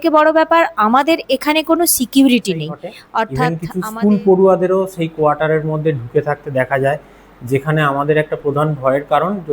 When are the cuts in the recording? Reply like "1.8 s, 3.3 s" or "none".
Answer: 3.6 s